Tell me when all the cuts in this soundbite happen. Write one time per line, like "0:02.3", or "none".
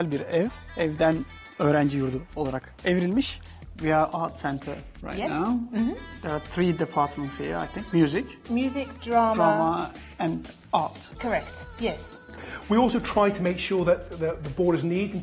0:03.4
0:12.3